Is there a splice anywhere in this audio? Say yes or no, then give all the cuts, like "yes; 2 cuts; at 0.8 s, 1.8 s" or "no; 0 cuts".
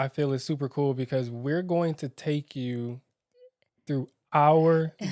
no; 0 cuts